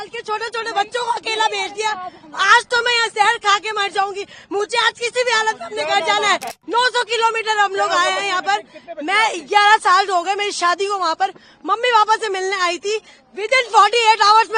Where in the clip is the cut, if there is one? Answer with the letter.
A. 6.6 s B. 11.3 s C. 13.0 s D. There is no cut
A